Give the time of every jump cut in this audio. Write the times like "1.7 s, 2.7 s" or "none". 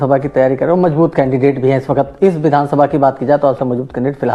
none